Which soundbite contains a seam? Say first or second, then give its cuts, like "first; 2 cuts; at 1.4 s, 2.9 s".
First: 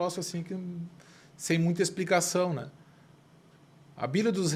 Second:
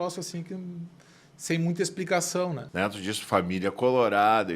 second; 1 cut; at 2.6 s